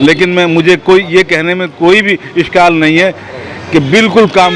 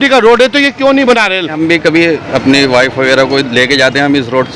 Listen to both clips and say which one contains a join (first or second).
second